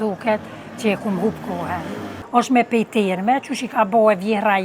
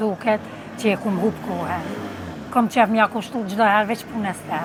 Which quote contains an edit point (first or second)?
first